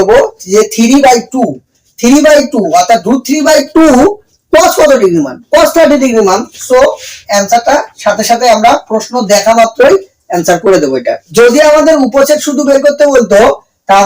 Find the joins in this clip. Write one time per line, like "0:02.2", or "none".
0:11.2